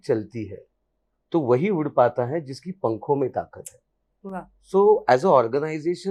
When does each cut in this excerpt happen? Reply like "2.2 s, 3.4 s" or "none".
none